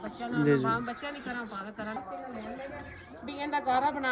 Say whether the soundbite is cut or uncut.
cut